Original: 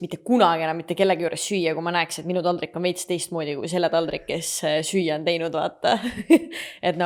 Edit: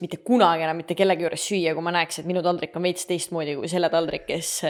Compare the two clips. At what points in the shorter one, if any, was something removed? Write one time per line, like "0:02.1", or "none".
none